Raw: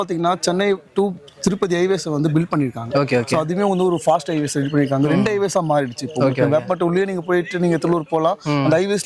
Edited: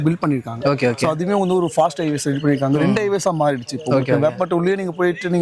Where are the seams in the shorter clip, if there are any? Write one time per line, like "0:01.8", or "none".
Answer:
none